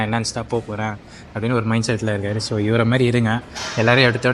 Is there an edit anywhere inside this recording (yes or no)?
no